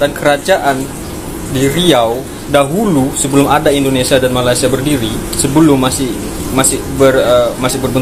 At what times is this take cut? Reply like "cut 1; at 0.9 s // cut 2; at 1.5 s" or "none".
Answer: none